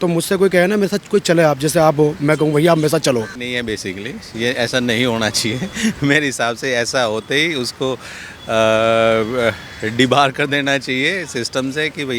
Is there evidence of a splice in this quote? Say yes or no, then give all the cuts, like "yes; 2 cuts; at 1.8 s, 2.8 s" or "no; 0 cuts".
yes; 1 cut; at 3.4 s